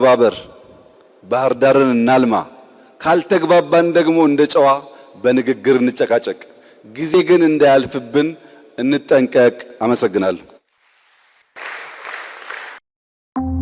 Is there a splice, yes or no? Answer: no